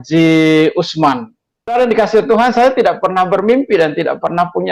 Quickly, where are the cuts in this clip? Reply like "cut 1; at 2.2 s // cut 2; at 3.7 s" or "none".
cut 1; at 1.7 s